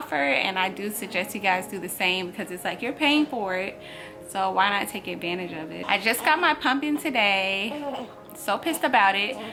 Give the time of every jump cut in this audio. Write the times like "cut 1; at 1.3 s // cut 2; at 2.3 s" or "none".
none